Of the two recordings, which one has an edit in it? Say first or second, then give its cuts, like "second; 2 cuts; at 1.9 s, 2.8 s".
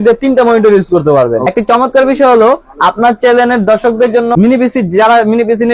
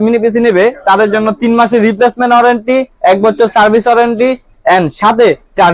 first; 2 cuts; at 1.5 s, 4.3 s